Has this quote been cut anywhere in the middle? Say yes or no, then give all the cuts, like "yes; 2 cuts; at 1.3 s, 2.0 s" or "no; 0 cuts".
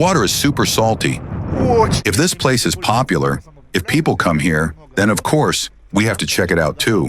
yes; 1 cut; at 1.9 s